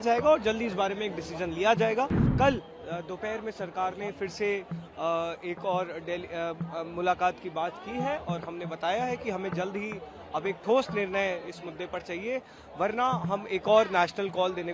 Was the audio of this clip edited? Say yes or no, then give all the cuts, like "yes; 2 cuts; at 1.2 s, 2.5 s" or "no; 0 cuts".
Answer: yes; 1 cut; at 2.2 s